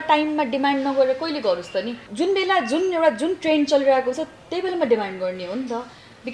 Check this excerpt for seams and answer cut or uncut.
cut